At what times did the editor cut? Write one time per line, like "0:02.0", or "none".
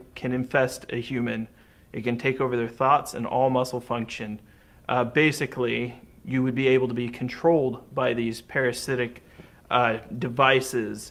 none